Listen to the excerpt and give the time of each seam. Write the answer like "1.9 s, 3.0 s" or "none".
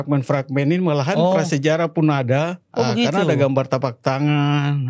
2.6 s